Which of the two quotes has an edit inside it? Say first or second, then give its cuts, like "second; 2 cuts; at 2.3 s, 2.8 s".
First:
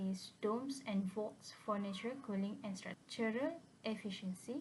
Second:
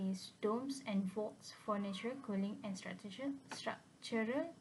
first; 1 cut; at 3.0 s